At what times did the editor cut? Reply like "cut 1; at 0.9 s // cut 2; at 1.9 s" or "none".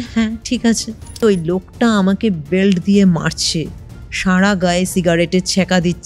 cut 1; at 1.1 s

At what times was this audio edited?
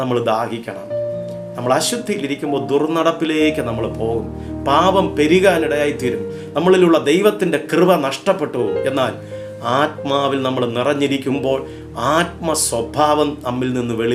none

